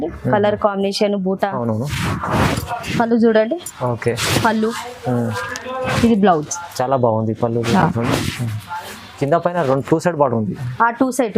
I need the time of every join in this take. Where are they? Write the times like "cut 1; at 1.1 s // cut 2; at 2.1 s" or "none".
cut 1; at 1.6 s